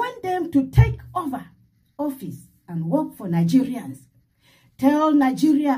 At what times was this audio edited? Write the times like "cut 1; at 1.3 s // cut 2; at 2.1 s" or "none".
none